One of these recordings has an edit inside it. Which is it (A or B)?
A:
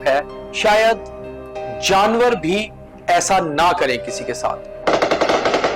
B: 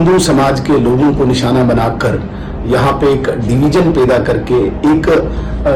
A